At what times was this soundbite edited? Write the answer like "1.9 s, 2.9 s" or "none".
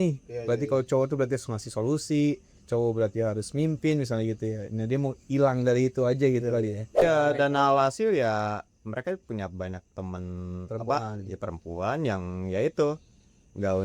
6.9 s